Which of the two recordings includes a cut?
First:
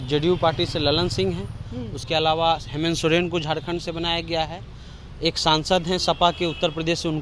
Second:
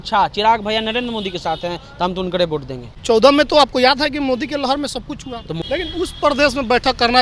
second; 2 cuts; at 2.9 s, 5.5 s

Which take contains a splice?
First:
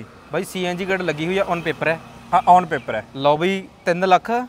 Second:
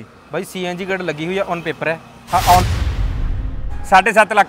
second; 1 cut; at 3.2 s

